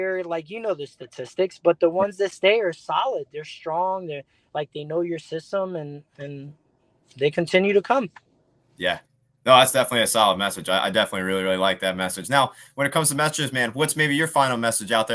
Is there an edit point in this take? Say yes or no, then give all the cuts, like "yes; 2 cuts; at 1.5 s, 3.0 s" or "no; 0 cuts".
no; 0 cuts